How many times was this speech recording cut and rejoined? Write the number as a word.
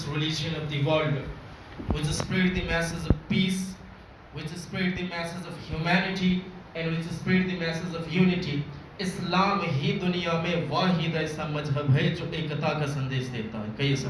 zero